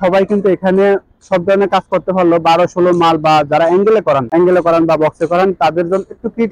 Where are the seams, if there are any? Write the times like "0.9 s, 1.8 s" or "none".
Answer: none